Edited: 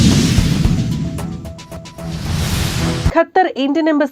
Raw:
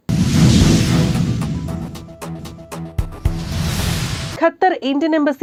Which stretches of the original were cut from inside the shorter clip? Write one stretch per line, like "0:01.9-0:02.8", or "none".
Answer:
0:02.4-0:03.2